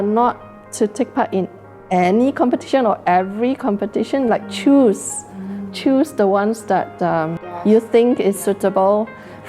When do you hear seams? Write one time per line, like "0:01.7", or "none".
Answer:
0:07.4